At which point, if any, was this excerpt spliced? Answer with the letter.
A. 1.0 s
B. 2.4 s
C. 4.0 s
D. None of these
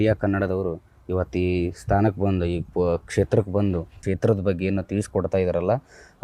C